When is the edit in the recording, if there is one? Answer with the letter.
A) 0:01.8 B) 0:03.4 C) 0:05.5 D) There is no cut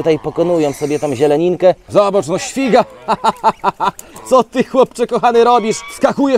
A